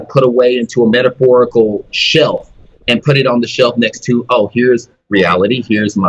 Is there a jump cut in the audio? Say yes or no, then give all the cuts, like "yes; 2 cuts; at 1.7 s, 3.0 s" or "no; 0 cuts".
no; 0 cuts